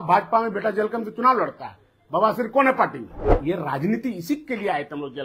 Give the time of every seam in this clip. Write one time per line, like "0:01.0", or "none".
0:03.4